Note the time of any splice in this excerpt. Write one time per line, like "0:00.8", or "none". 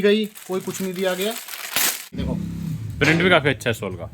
0:02.2